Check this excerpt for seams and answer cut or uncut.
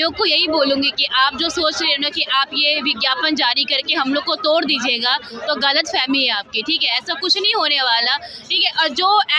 uncut